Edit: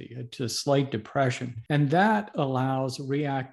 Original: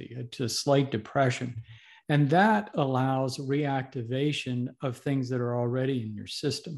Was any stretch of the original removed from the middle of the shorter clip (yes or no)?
yes